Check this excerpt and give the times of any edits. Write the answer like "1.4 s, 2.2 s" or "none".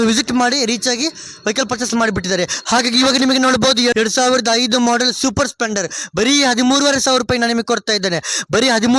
2.6 s, 3.9 s